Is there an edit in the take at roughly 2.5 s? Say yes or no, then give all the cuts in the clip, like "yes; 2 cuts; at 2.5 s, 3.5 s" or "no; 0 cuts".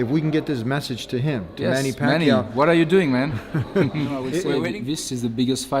no; 1 cut; at 4.4 s